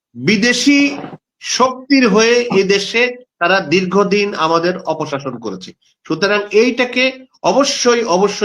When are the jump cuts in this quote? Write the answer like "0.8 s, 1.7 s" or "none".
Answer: none